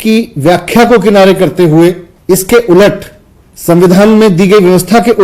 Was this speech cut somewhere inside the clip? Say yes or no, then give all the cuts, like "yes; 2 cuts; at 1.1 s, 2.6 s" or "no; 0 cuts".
yes; 1 cut; at 2.1 s